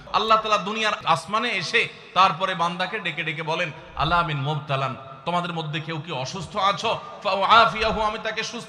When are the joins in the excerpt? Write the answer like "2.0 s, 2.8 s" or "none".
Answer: 1.0 s